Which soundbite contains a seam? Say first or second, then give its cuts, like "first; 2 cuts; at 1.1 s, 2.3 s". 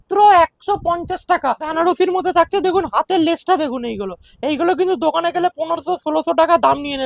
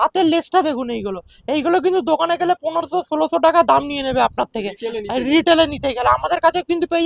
first; 1 cut; at 1.7 s